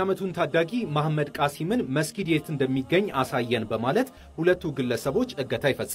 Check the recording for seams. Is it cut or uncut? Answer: uncut